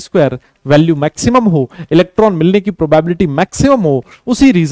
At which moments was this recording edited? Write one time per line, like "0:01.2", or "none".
none